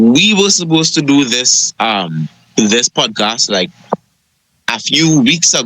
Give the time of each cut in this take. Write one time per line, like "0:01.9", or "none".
0:02.4